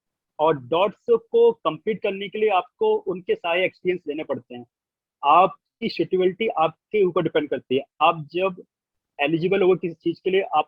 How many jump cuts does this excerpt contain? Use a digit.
0